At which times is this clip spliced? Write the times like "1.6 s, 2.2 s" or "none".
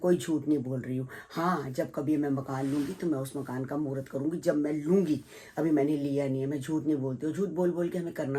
none